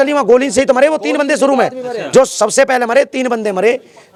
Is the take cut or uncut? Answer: uncut